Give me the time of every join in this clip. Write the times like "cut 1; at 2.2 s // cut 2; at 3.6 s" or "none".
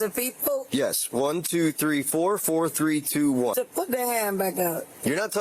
cut 1; at 1.6 s // cut 2; at 4.5 s